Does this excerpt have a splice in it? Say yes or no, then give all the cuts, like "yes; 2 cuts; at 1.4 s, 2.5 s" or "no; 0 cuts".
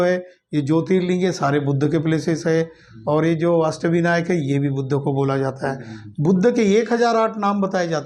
no; 0 cuts